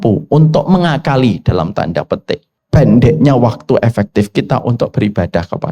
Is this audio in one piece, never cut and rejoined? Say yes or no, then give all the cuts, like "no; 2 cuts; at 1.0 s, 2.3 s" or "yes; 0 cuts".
no; 1 cut; at 2.5 s